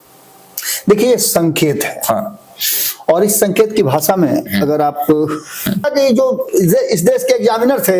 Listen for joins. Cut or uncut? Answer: cut